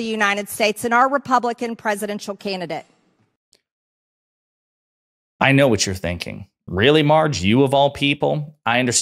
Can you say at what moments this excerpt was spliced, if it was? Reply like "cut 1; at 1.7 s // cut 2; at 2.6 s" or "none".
none